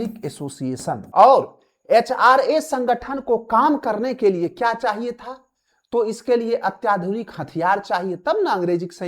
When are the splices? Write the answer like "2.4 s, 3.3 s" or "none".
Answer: 1.0 s